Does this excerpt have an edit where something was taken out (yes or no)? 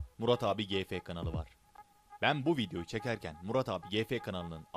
no